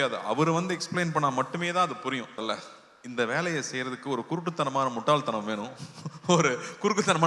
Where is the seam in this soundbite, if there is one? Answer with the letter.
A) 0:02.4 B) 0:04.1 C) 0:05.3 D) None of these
A